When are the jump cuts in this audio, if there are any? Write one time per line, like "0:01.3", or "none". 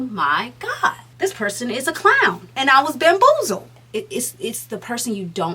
0:01.1
0:02.4
0:03.8